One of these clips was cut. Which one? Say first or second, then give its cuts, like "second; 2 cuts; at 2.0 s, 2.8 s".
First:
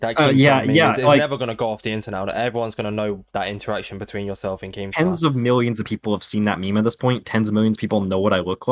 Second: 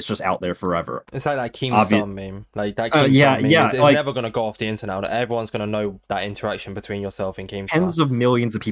second; 1 cut; at 1.0 s